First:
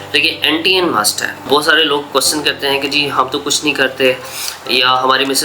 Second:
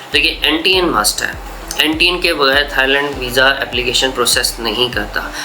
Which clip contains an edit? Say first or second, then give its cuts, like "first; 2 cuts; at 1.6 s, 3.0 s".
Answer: first; 1 cut; at 1.5 s